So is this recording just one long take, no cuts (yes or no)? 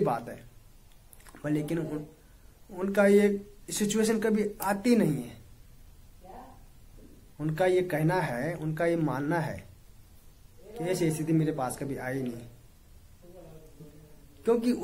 yes